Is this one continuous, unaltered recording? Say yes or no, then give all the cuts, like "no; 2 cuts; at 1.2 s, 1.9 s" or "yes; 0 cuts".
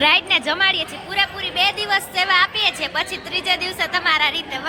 yes; 0 cuts